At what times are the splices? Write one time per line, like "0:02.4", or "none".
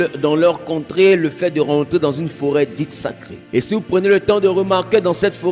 0:03.3